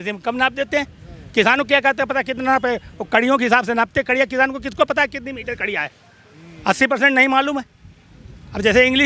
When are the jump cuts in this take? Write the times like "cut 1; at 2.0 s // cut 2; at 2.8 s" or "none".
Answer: none